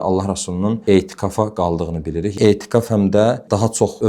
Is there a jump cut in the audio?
yes; 1 cut; at 2.3 s

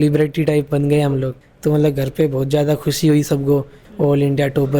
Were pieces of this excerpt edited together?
yes; 2 cuts; at 1.4 s, 3.8 s

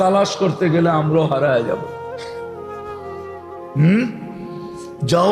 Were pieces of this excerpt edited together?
yes; 2 cuts; at 2.3 s, 3.7 s

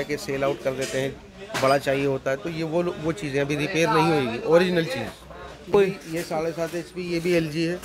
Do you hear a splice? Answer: yes; 1 cut; at 5.7 s

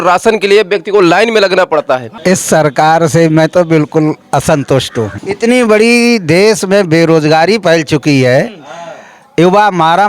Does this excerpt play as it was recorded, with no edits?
no; 2 cuts; at 2.1 s, 5.2 s

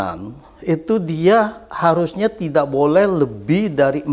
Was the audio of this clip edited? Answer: no; 0 cuts

